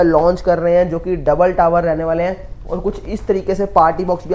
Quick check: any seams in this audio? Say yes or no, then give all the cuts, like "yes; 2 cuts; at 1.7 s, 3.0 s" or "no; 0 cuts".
no; 0 cuts